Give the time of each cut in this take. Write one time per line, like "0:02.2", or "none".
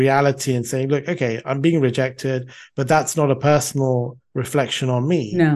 none

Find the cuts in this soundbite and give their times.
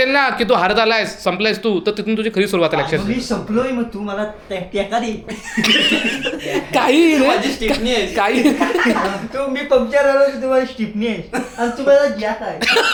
none

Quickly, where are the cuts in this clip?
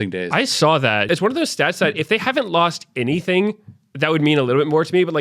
0:01.0

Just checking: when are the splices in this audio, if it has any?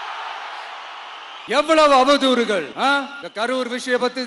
none

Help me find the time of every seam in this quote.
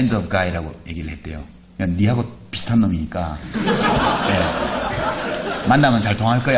none

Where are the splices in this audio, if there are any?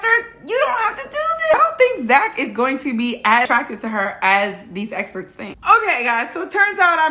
0:01.5
0:03.5
0:05.4

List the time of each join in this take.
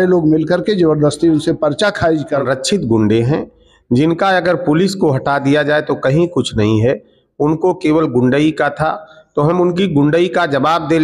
0:02.4

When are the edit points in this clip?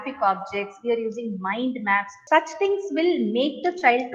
0:02.1

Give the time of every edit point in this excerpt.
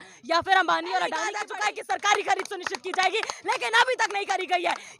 0:01.4

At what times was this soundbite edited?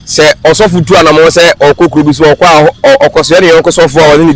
none

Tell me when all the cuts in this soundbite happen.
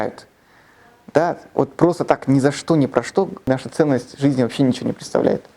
0:03.5

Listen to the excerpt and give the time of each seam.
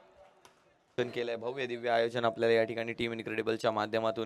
0:01.0

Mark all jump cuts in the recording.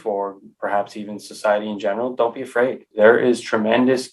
0:02.8

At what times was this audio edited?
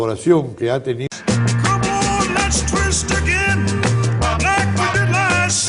none

